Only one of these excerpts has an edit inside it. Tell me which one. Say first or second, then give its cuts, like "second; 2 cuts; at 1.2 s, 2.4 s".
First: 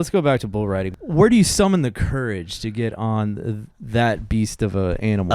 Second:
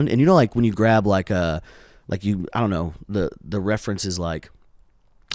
first; 1 cut; at 0.9 s